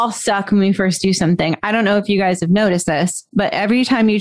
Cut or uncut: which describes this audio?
uncut